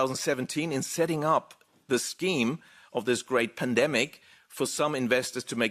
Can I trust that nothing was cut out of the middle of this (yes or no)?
yes